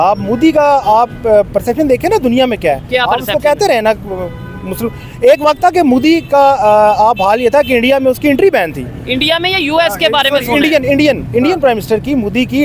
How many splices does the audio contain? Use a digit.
0